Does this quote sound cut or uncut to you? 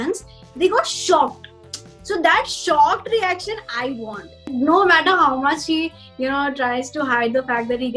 cut